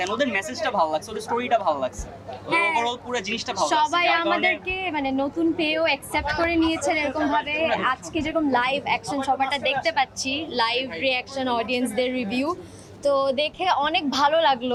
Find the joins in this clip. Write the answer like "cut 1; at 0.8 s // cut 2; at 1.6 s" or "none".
none